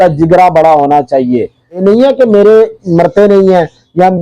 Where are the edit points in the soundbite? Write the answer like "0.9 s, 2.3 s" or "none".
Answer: 1.8 s